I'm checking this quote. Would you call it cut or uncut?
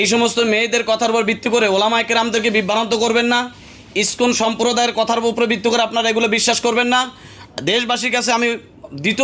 uncut